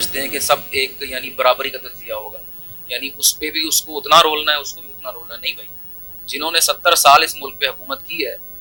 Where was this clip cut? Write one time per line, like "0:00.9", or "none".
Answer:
none